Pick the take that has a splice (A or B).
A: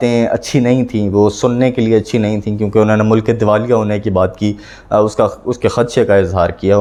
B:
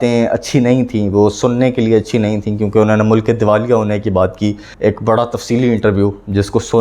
B